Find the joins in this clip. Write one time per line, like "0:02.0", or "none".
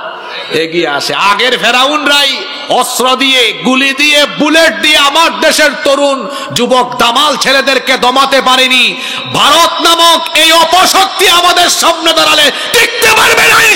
none